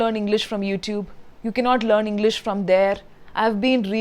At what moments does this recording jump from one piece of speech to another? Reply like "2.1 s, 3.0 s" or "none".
none